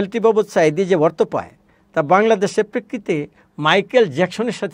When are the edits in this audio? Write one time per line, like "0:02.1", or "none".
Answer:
none